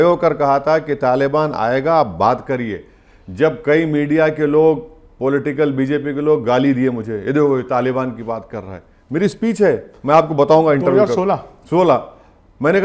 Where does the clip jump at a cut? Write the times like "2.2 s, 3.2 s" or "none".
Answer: none